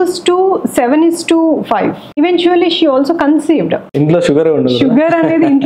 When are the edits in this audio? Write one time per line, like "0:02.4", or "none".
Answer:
0:02.2
0:03.8